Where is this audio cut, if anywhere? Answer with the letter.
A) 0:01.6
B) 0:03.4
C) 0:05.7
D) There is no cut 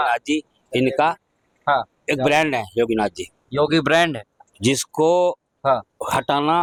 D